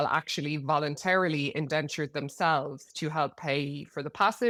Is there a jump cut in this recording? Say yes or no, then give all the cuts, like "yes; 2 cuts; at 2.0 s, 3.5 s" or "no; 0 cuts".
no; 0 cuts